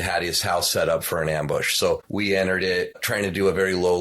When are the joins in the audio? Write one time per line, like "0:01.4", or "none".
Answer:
0:02.1
0:03.1